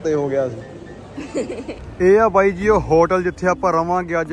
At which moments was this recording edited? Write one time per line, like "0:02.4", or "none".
0:01.8